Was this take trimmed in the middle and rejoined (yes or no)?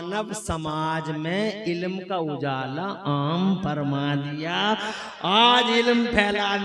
no